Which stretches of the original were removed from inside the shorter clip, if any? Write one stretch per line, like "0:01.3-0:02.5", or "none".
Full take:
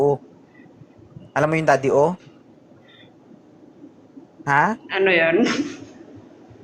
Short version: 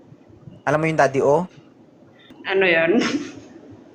0:03.1-0:04.8